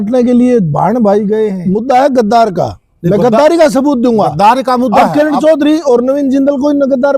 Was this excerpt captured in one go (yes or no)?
no